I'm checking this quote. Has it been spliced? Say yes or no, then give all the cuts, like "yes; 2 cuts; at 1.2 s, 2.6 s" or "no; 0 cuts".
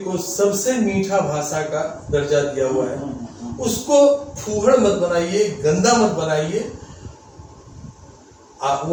no; 0 cuts